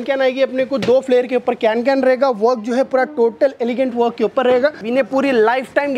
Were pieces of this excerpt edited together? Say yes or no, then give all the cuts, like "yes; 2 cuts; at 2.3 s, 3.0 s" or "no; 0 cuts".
yes; 1 cut; at 4.8 s